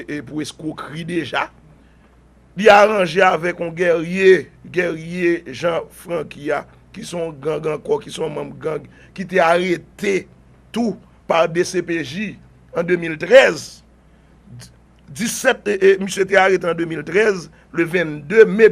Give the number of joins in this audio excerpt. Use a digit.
1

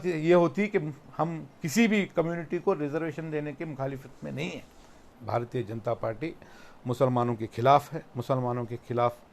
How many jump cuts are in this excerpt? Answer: 1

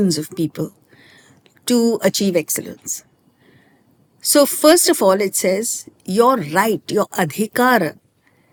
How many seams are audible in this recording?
0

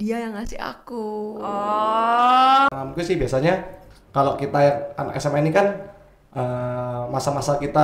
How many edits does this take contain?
1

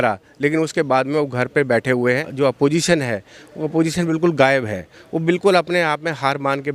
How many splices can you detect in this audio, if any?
1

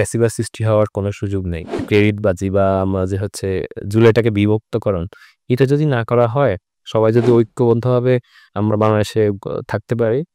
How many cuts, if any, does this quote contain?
1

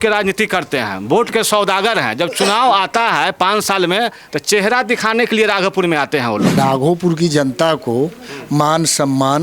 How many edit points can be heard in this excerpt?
1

